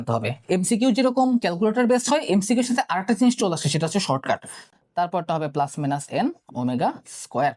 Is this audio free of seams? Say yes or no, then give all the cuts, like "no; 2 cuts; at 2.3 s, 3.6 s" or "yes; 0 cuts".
no; 1 cut; at 4.7 s